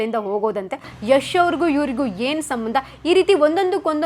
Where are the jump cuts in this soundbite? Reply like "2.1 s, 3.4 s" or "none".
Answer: 0.9 s

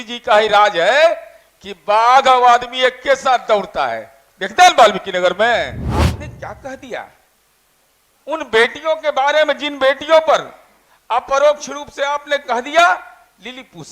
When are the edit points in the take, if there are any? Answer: 5.8 s

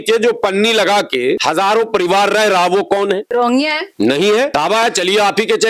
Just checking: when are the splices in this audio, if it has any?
1.4 s, 3.2 s, 4.5 s

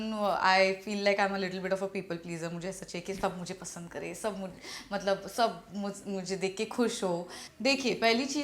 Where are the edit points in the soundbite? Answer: 7.4 s

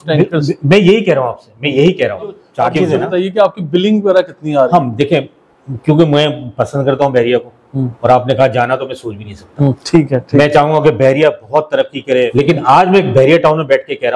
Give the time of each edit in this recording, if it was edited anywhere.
2.4 s, 12.3 s

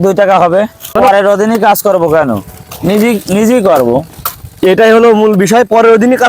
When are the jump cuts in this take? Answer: 0.9 s

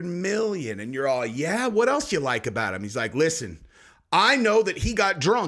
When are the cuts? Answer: none

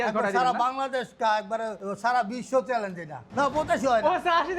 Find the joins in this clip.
1.8 s, 3.2 s

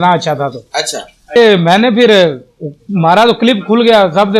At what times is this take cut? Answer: 1.3 s

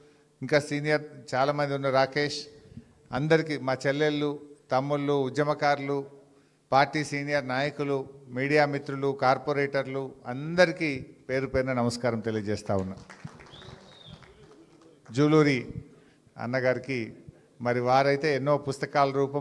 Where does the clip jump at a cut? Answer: 13.2 s

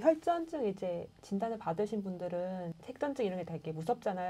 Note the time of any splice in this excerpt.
2.8 s

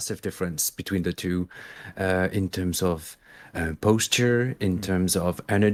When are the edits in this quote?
none

